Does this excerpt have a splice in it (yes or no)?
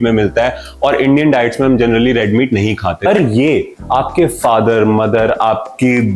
yes